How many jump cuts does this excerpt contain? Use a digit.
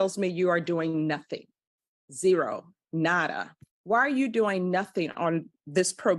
0